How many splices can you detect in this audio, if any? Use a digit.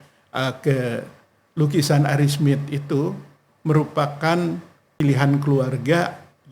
1